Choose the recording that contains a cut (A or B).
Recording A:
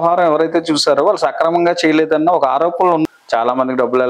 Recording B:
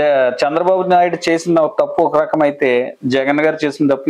A